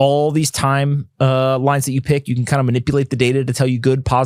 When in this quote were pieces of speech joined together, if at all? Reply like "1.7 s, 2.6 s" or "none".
none

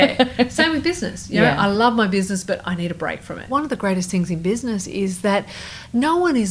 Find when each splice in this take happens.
3.5 s

